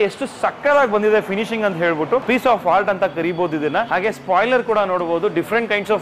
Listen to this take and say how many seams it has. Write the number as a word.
two